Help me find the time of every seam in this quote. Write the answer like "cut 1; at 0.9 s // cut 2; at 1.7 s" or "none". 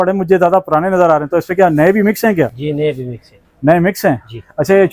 none